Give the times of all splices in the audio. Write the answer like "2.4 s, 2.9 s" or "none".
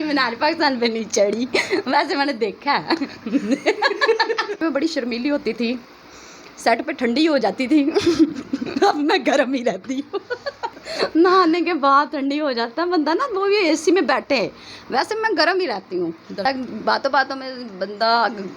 4.6 s, 10.7 s, 16.4 s